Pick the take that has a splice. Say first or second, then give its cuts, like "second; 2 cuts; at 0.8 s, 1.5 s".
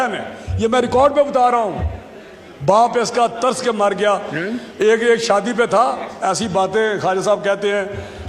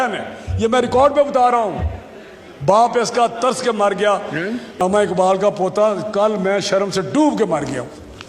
second; 1 cut; at 4.6 s